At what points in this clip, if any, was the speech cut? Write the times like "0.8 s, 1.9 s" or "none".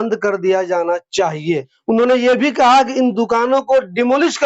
1.7 s